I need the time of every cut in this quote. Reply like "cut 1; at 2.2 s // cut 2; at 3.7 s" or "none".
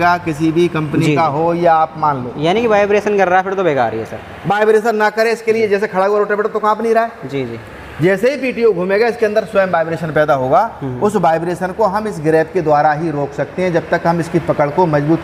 none